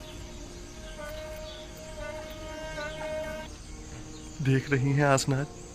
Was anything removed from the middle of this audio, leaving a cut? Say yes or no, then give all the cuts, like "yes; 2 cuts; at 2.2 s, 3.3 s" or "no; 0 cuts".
yes; 1 cut; at 3.4 s